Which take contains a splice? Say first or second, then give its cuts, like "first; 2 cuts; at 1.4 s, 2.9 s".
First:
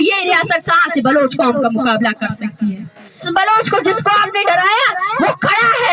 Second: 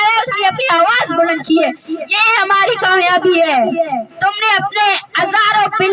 first; 1 cut; at 3.3 s